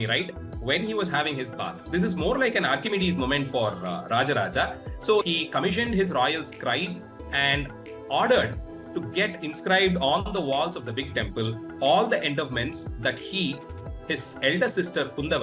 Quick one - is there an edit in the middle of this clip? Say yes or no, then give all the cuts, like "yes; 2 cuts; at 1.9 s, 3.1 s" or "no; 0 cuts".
yes; 1 cut; at 5.2 s